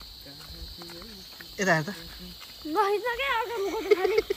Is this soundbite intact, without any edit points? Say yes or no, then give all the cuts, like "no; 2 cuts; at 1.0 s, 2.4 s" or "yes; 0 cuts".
yes; 0 cuts